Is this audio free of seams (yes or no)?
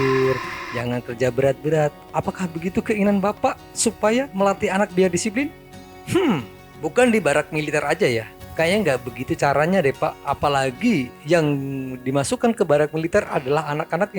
yes